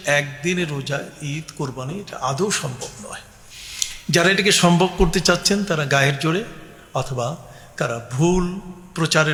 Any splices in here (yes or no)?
no